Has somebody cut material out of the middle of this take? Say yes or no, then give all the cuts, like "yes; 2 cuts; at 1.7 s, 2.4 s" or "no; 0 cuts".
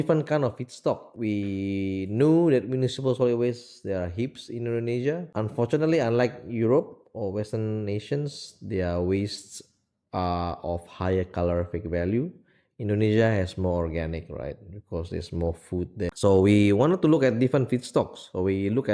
yes; 3 cuts; at 1.1 s, 5.3 s, 16.1 s